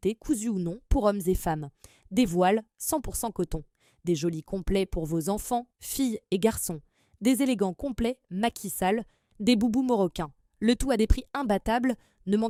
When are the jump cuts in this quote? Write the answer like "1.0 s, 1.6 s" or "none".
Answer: none